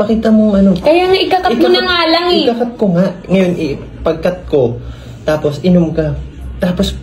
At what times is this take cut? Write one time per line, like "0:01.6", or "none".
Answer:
none